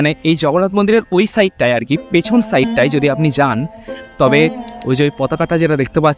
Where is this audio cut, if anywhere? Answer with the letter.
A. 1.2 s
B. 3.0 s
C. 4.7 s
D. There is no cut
C